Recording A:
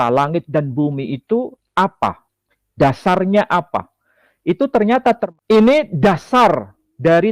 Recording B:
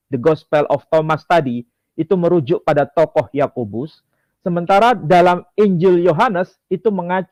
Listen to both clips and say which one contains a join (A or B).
A